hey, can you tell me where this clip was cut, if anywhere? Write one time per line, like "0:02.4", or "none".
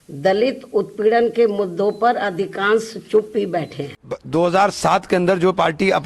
0:04.1